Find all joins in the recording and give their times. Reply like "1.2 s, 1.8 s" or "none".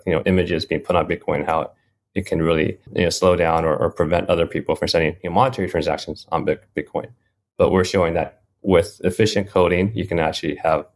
2.9 s